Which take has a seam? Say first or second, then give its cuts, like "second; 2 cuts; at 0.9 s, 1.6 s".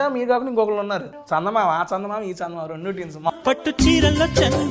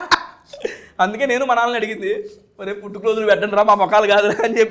first; 2 cuts; at 1.1 s, 3.3 s